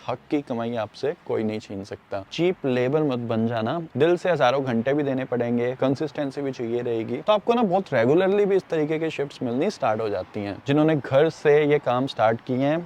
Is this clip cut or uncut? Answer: cut